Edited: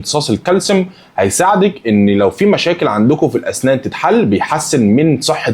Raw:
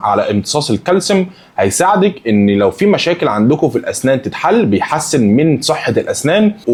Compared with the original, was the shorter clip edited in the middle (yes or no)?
no